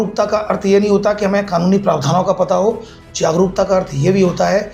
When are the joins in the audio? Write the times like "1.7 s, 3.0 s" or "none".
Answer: none